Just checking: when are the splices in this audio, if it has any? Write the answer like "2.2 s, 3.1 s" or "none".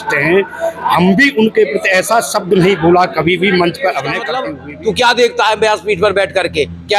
4.3 s